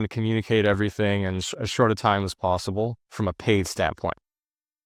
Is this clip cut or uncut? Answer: uncut